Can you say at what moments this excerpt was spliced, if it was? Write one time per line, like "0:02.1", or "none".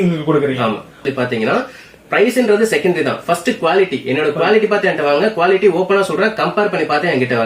0:01.0

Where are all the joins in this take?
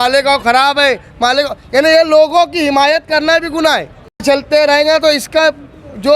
none

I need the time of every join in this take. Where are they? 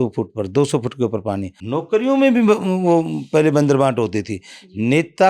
0:01.5

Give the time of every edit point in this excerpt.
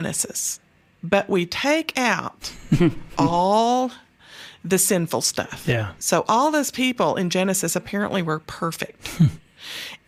none

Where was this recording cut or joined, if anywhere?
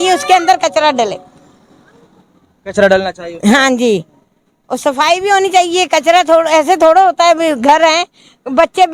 none

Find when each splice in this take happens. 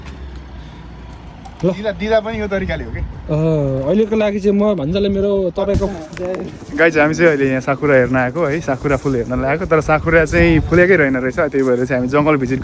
0:05.9

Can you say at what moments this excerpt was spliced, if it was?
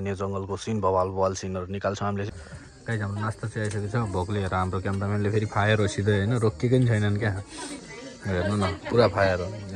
0:02.3

